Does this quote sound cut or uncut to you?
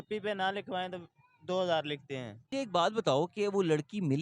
cut